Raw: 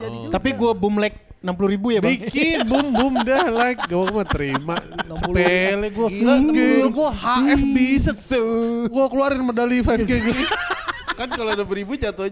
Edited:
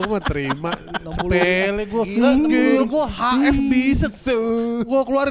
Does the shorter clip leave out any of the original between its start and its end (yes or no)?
no